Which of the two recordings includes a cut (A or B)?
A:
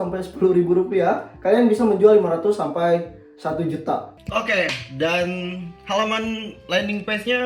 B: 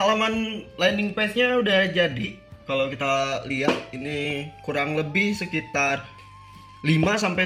A